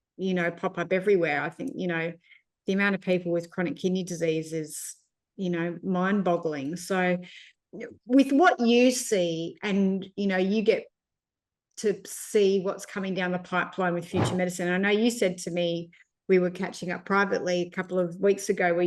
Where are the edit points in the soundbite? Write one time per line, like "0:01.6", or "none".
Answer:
none